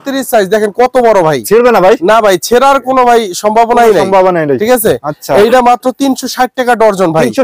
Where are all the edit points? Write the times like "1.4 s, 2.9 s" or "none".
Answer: none